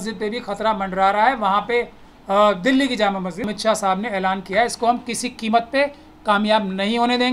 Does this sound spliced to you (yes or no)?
yes